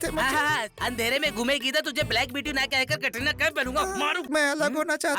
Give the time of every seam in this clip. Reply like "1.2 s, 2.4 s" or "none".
4.2 s